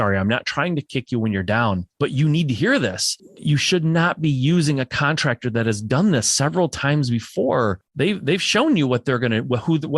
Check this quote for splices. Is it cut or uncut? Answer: cut